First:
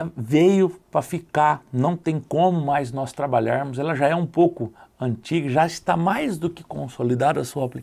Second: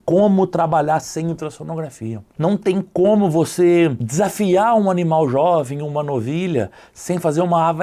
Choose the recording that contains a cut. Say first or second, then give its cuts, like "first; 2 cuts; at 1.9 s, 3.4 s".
second; 1 cut; at 4.0 s